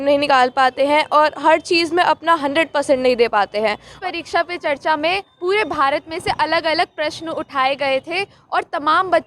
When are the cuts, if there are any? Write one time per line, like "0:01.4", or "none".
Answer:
0:03.9